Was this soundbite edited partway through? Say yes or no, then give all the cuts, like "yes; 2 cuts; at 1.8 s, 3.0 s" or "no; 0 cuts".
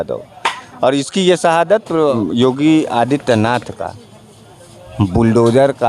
yes; 1 cut; at 2.1 s